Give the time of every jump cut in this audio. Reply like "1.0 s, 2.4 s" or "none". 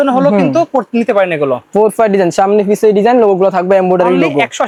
none